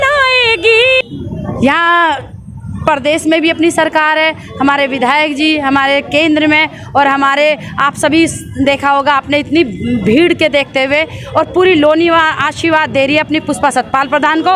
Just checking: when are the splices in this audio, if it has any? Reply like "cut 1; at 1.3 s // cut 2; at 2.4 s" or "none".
cut 1; at 1.0 s